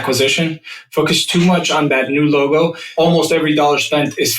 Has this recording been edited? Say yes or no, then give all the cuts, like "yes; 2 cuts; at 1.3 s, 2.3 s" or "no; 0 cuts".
yes; 2 cuts; at 1.9 s, 2.9 s